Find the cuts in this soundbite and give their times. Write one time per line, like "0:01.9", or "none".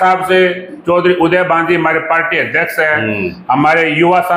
none